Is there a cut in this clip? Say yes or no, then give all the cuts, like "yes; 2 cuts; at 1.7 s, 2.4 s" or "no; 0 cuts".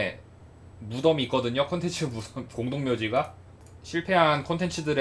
no; 0 cuts